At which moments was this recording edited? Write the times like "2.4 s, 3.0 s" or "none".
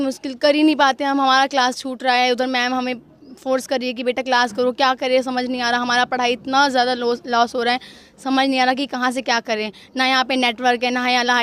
none